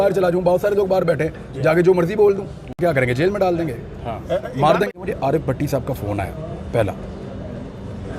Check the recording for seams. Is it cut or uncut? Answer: cut